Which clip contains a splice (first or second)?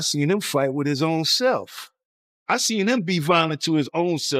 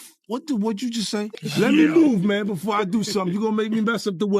second